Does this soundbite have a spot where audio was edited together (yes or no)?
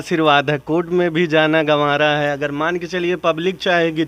no